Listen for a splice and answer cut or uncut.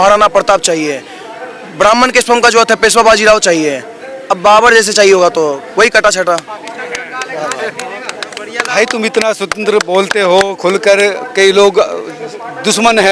uncut